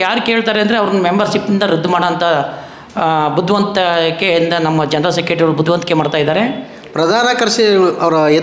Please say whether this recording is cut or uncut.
cut